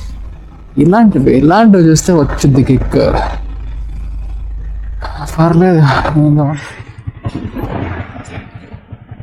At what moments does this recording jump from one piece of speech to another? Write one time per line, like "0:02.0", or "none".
0:06.5